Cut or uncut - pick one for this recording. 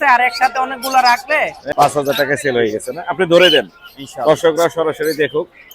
cut